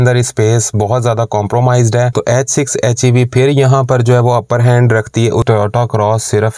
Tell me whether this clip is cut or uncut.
cut